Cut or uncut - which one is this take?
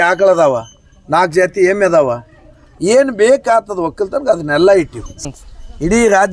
cut